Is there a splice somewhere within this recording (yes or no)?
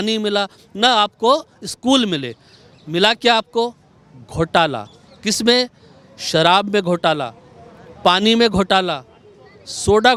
no